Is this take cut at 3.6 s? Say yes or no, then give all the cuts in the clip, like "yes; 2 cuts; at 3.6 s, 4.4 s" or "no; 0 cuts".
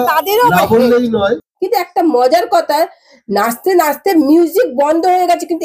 no; 1 cut; at 1.5 s